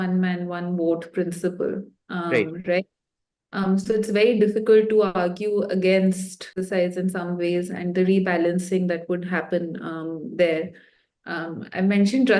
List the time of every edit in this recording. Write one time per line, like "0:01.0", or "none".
none